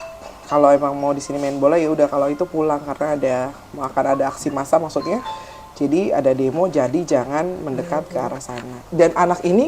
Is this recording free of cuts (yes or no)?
no